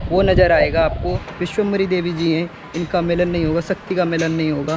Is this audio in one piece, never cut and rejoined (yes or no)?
no